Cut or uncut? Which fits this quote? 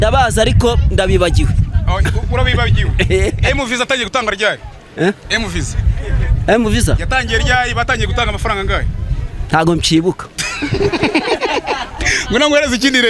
uncut